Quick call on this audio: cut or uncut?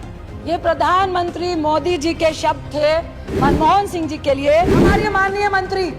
cut